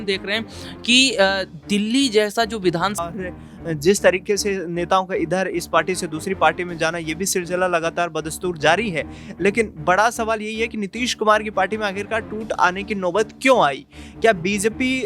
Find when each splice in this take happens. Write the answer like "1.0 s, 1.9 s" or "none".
3.1 s